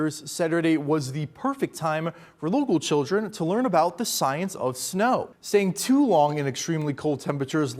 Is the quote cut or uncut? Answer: cut